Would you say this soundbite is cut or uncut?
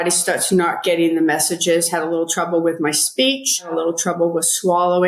cut